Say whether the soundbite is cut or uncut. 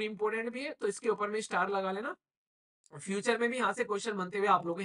uncut